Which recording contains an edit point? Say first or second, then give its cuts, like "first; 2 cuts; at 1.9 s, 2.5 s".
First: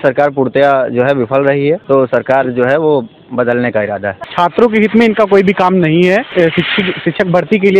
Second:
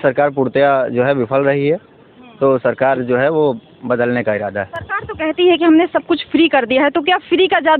first; 3 cuts; at 1.8 s, 4.3 s, 6.3 s